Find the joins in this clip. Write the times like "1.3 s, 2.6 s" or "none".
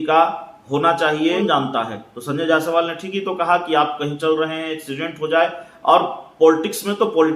1.4 s